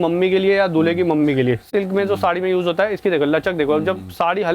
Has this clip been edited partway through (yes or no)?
yes